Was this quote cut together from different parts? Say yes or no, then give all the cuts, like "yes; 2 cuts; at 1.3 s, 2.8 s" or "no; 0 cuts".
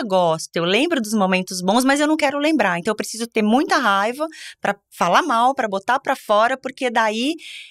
no; 0 cuts